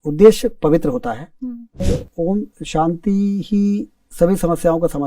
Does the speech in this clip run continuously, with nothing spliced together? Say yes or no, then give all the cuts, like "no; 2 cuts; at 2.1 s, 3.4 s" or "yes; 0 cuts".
no; 1 cut; at 1.8 s